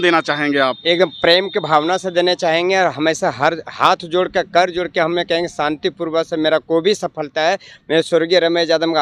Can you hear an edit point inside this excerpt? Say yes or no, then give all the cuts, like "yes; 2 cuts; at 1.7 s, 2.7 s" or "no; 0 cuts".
no; 0 cuts